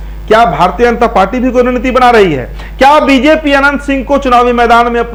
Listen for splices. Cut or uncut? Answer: uncut